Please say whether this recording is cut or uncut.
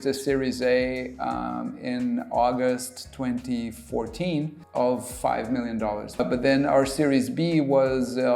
cut